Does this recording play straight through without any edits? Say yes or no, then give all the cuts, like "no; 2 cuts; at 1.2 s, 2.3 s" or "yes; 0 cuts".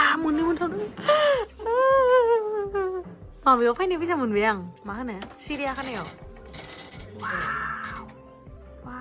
yes; 0 cuts